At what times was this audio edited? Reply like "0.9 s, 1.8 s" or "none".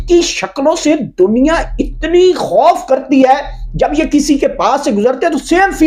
none